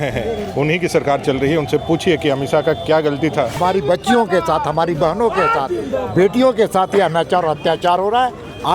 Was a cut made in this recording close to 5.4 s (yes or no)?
no